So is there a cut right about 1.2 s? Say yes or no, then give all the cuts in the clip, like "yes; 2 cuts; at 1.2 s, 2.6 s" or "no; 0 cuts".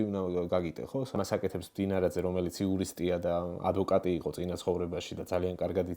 yes; 1 cut; at 1.2 s